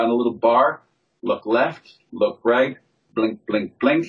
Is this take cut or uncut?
uncut